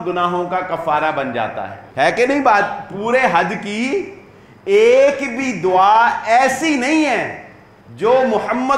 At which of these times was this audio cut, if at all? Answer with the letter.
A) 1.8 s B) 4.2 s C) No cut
A